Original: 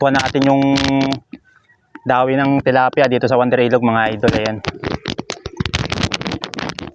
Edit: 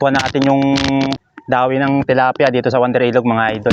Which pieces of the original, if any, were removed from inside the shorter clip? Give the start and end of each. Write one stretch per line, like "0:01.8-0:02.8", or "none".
0:01.3-0:01.9